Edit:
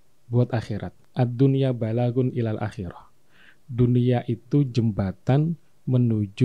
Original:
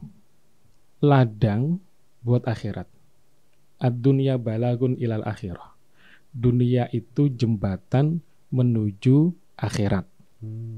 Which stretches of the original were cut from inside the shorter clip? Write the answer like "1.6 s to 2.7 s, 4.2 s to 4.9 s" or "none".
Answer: 2.9 s to 3.6 s

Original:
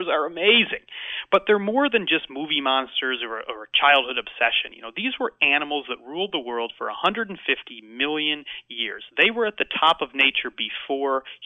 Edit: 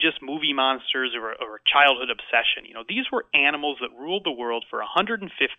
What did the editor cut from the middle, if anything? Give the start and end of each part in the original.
none

